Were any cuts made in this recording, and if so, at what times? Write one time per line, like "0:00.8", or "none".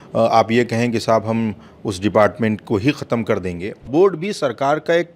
0:03.9